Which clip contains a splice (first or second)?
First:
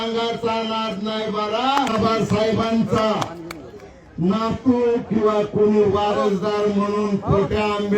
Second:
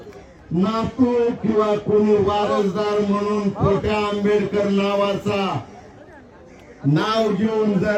first